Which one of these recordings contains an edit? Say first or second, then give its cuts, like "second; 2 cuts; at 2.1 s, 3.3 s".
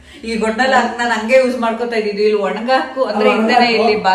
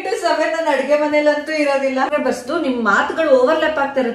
second; 1 cut; at 2.1 s